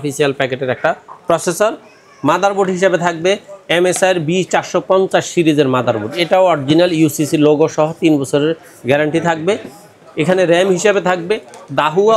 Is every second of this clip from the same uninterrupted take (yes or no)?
yes